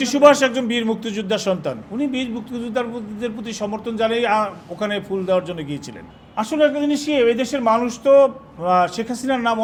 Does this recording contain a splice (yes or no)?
no